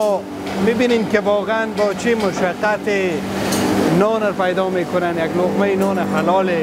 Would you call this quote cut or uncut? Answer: uncut